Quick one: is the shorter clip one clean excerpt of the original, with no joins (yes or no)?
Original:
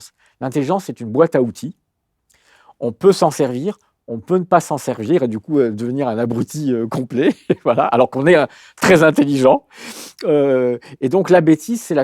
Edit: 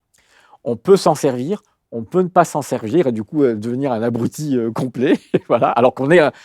yes